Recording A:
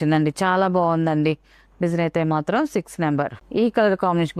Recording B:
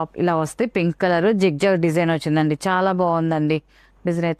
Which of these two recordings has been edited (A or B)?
A